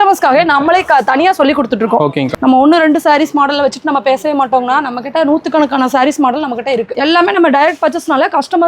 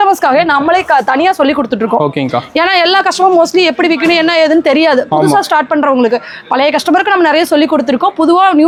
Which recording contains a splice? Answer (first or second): first